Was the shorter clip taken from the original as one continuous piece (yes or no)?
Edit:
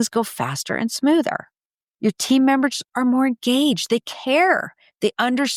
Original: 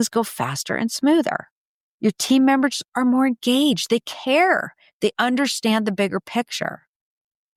yes